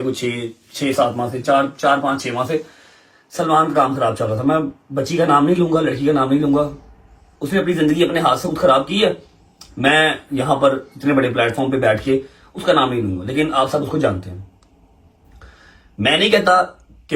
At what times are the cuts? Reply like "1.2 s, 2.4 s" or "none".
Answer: none